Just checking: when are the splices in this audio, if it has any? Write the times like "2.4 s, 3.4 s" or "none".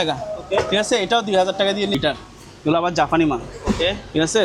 2.0 s